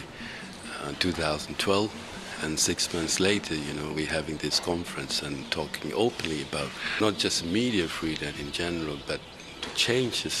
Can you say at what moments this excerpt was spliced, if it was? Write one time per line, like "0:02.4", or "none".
none